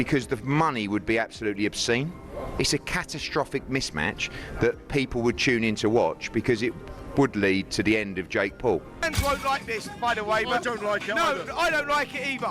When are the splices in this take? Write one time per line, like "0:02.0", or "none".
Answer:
0:09.1